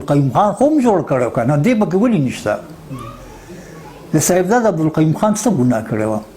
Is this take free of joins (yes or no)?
yes